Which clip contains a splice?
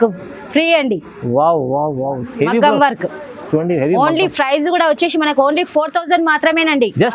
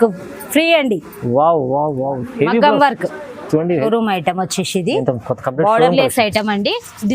second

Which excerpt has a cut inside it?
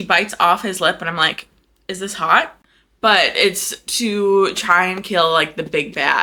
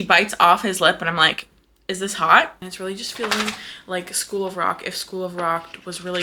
second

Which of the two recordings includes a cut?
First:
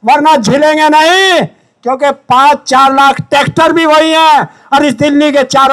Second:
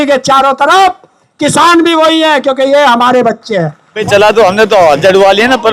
second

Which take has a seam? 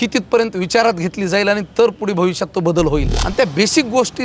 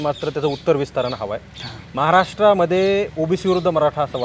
first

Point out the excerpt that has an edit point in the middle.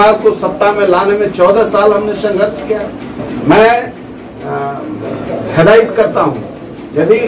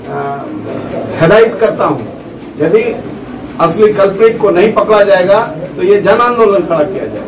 first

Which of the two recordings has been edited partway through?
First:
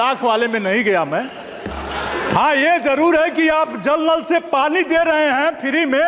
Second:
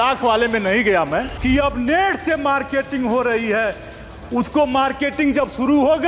second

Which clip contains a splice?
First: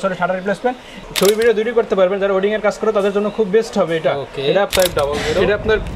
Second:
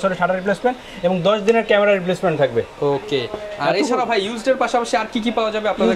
first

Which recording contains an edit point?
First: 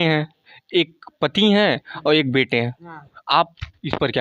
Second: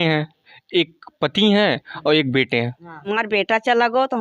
second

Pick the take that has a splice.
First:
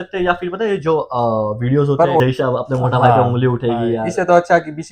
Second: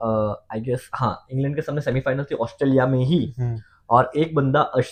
first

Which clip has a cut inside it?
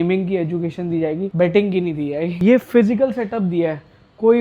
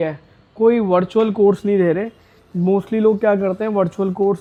first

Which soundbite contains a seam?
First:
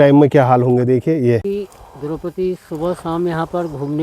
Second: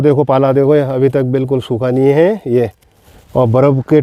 first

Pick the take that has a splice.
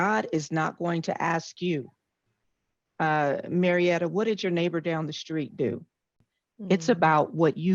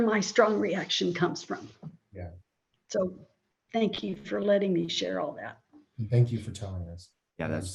first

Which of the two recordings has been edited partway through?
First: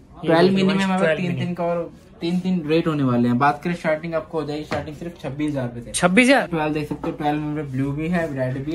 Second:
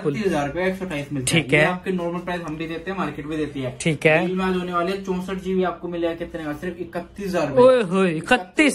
first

